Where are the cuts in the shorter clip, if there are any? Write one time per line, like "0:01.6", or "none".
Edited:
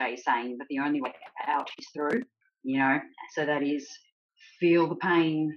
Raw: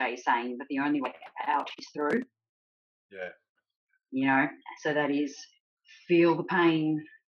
0:02.4